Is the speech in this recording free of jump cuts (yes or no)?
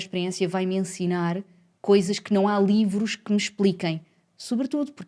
yes